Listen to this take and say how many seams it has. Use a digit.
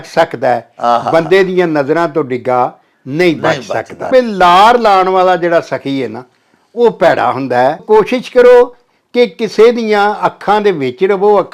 2